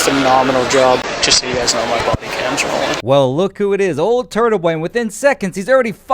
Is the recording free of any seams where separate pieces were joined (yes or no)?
no